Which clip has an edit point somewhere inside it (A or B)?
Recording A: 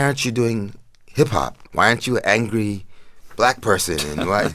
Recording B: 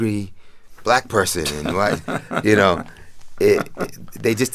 A